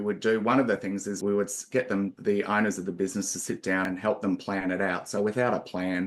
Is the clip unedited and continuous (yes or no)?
no